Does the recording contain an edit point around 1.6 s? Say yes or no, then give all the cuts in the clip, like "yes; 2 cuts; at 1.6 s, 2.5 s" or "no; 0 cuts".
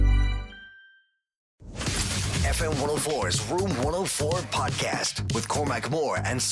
yes; 1 cut; at 1.6 s